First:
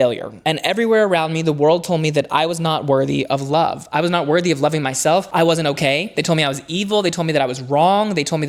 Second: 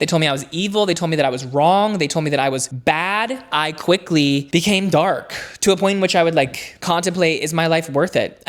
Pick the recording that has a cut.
second; 1 cut; at 3.4 s

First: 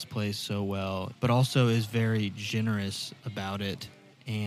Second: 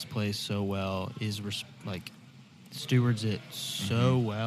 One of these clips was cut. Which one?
first; 1 cut; at 1.1 s

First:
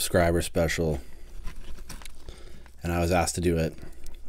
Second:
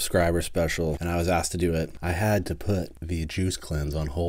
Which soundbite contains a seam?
second; 3 cuts; at 1.0 s, 2.0 s, 3.0 s

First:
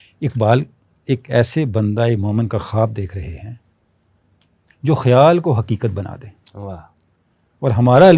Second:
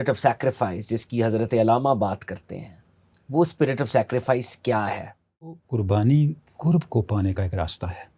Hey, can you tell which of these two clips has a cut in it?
second; 1 cut; at 5.6 s

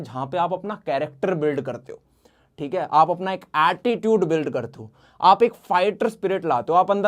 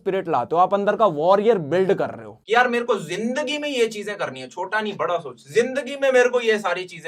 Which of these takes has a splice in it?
second; 1 cut; at 2.3 s

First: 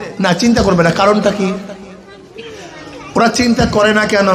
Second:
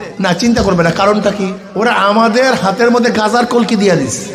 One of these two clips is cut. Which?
second; 1 cut; at 1.6 s

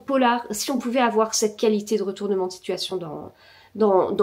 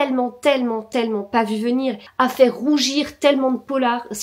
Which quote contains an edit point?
second; 1 cut; at 2.0 s

